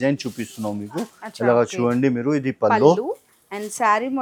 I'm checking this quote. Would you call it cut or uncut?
uncut